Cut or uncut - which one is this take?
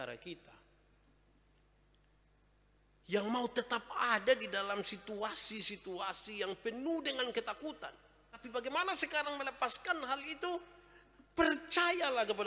cut